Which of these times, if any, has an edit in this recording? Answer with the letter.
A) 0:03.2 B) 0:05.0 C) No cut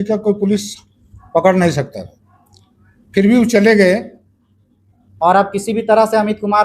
B